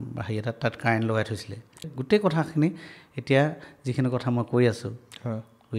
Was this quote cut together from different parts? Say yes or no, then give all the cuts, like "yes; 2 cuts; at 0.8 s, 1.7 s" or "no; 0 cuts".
yes; 1 cut; at 1.8 s